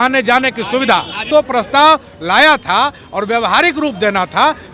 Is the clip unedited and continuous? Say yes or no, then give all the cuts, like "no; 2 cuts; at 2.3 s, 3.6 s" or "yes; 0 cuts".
no; 1 cut; at 1.2 s